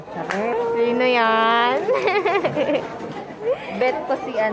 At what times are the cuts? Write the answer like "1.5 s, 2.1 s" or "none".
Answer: none